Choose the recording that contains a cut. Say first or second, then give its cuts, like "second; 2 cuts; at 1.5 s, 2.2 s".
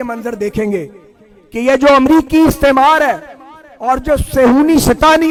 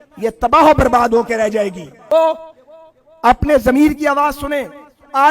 second; 1 cut; at 2.1 s